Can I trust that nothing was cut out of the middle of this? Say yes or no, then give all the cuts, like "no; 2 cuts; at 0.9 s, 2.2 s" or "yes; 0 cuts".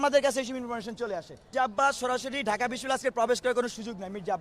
no; 1 cut; at 1.5 s